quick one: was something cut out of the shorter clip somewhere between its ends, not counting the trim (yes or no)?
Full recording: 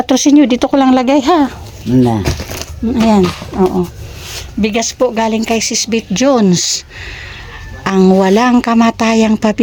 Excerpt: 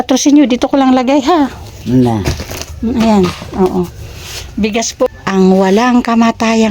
yes